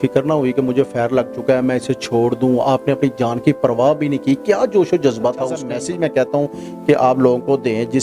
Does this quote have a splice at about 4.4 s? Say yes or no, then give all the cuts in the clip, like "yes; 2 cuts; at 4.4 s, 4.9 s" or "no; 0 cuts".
no; 1 cut; at 5.6 s